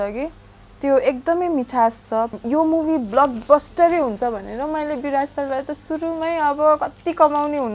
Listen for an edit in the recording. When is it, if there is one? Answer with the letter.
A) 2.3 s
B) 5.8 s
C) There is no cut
A